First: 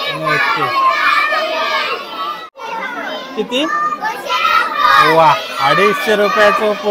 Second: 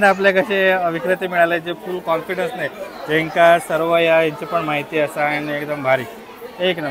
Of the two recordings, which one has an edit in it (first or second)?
first